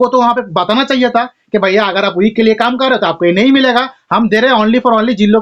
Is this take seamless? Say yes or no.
yes